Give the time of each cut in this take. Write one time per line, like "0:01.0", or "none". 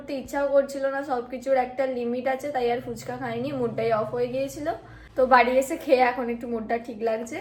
none